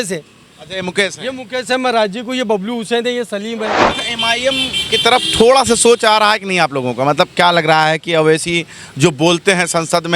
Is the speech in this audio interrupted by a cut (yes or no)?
yes